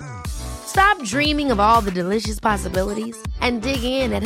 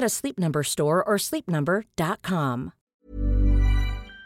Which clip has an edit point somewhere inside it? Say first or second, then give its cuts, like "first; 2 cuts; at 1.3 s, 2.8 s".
second; 1 cut; at 2.8 s